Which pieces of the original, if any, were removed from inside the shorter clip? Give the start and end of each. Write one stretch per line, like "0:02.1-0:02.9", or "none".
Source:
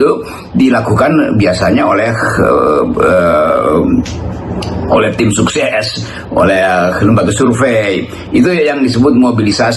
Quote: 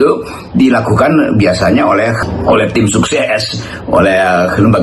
0:02.2-0:04.7